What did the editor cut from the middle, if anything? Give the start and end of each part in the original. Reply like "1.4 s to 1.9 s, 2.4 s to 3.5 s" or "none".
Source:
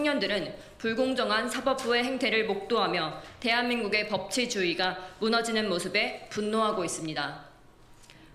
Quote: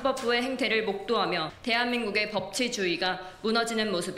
3.2 s to 3.3 s